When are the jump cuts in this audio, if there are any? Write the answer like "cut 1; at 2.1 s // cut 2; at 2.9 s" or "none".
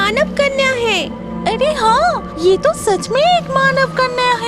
cut 1; at 2.3 s